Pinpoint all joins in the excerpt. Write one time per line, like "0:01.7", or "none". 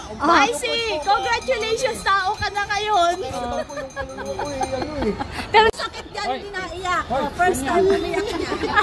none